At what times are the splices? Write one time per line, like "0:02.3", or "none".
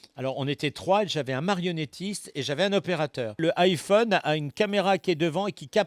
0:03.4